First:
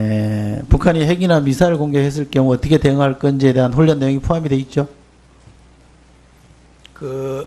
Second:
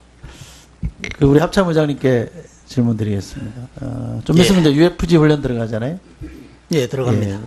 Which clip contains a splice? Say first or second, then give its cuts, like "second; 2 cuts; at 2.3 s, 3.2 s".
first; 1 cut; at 4.0 s